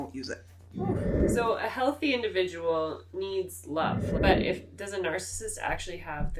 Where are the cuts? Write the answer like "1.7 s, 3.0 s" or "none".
1.2 s, 4.1 s